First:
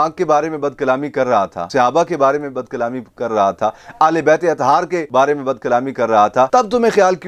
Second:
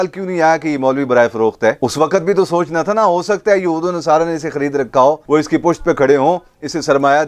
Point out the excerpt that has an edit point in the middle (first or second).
first